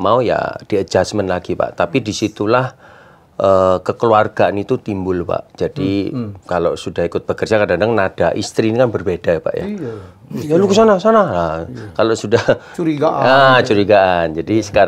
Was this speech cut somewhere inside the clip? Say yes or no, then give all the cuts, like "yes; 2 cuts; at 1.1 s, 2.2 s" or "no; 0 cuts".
no; 0 cuts